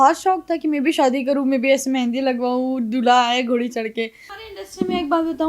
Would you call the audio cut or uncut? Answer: cut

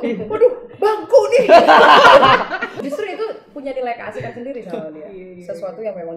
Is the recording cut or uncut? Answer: cut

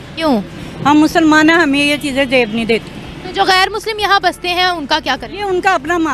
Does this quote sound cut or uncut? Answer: uncut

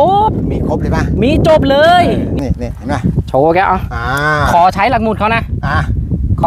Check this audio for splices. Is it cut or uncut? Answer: cut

